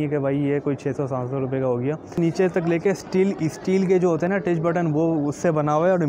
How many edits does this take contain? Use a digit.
1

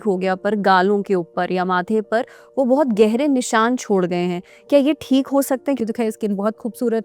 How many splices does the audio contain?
1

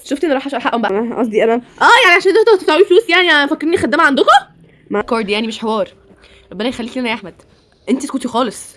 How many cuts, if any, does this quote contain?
2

